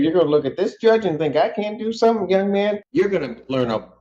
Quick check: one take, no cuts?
no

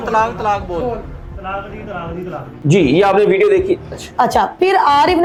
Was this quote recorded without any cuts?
yes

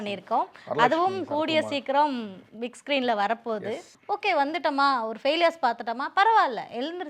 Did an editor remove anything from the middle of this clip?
yes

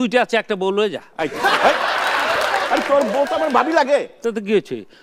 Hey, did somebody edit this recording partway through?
yes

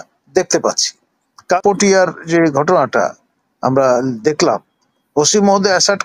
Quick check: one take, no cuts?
no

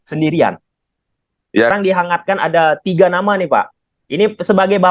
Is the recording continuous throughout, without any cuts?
no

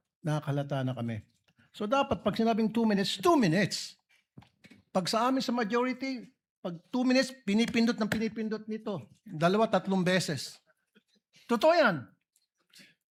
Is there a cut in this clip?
no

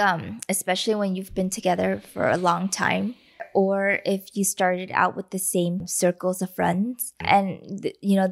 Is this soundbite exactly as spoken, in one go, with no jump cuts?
no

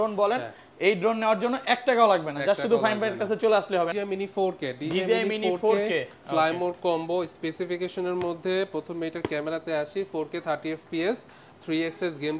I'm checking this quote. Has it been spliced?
yes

